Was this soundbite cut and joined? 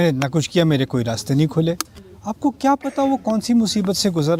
no; 0 cuts

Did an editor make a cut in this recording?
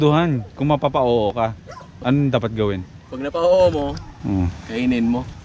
yes; 1 cut; at 1.3 s

